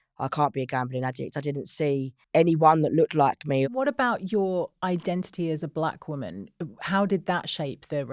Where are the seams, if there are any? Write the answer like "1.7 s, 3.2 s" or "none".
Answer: 2.2 s, 3.7 s